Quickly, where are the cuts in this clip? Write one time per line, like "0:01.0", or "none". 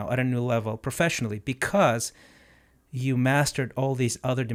none